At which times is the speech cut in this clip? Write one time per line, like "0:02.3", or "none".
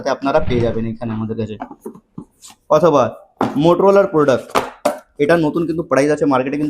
none